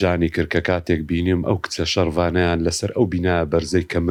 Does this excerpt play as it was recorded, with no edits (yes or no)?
yes